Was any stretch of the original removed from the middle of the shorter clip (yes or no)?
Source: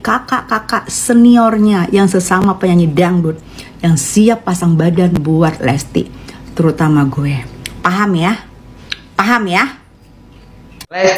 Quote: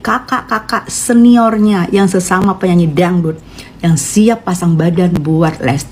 no